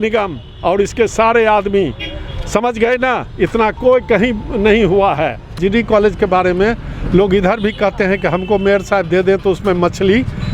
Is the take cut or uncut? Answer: cut